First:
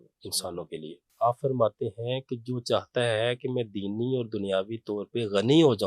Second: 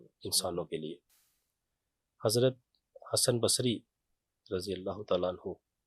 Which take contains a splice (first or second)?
first